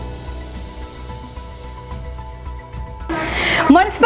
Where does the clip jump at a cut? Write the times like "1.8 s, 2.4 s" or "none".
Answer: 1.3 s, 3.0 s

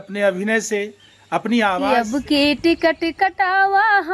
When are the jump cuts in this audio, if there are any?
1.9 s

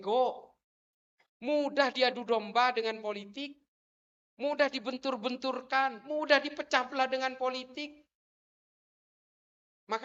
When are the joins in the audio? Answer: none

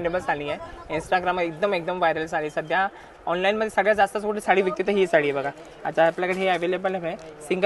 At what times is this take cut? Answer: none

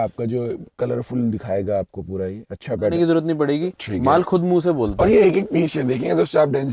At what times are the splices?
2.9 s

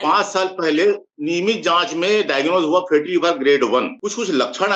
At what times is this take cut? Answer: 1.1 s, 3.9 s

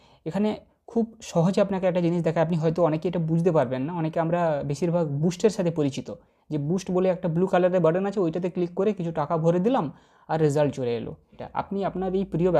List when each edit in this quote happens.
11.4 s

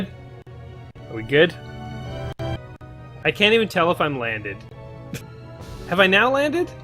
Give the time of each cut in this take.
2.6 s

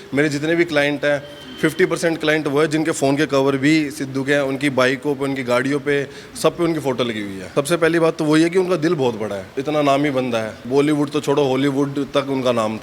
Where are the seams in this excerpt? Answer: 7.5 s, 9.5 s, 10.6 s

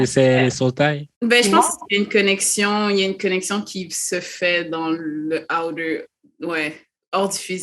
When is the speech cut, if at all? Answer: 1.1 s

